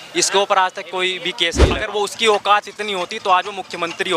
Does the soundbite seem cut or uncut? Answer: cut